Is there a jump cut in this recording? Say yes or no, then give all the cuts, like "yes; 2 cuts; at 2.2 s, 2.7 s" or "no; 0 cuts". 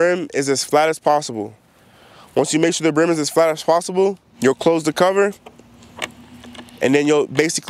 yes; 2 cuts; at 4.3 s, 5.9 s